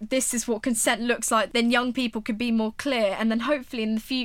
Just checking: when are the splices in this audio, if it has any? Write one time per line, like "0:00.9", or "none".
0:01.5